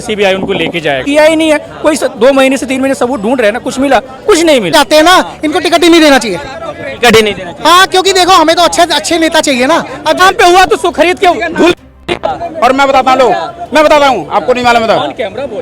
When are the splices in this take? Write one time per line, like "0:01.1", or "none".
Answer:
0:01.0
0:04.7
0:10.2